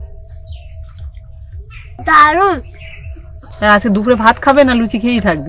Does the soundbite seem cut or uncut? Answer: uncut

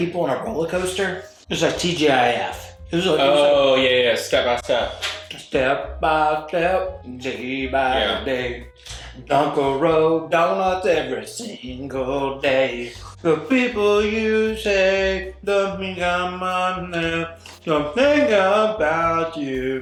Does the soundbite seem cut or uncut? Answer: uncut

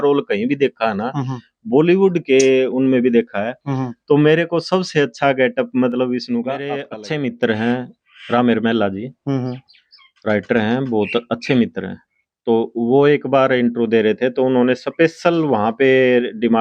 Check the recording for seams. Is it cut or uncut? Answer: cut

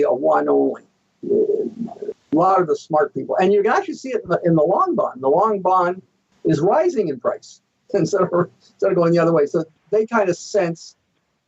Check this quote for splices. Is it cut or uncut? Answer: cut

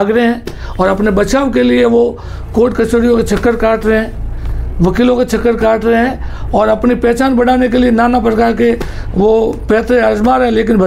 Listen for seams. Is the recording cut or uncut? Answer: uncut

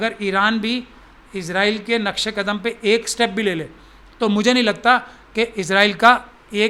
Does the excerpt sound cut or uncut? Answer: uncut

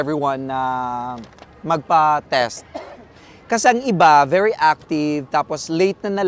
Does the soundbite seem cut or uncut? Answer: uncut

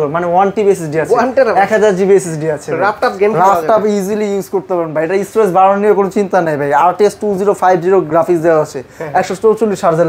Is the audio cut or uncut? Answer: uncut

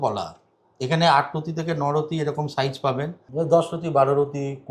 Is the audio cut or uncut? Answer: cut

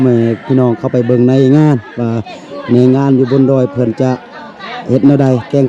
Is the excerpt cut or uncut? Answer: uncut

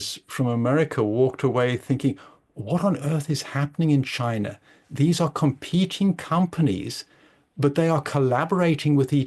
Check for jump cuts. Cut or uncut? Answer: uncut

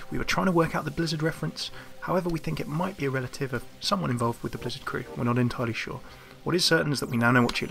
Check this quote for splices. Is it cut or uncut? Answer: cut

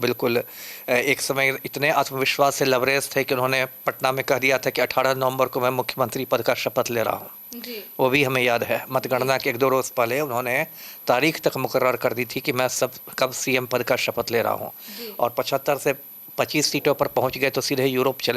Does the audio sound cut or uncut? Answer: uncut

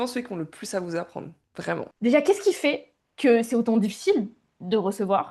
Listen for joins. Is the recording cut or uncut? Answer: cut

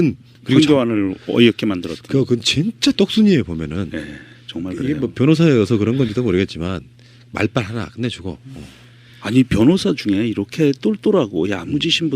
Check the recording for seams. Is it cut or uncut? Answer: cut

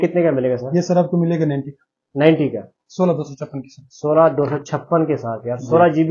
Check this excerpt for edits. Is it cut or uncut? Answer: uncut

